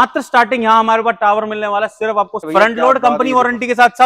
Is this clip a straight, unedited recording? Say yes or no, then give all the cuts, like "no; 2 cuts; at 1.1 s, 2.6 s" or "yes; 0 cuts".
no; 1 cut; at 2.4 s